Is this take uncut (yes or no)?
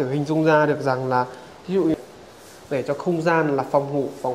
no